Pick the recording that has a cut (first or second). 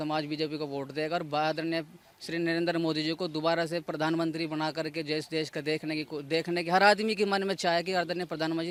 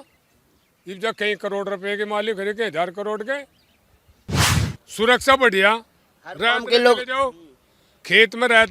second